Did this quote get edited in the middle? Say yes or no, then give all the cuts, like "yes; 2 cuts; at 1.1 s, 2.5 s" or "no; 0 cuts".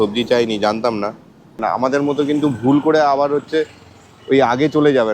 yes; 1 cut; at 1.6 s